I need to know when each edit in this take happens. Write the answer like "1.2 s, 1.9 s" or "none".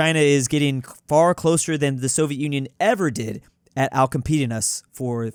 none